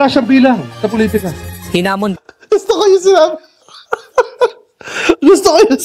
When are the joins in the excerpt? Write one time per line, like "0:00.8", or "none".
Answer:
none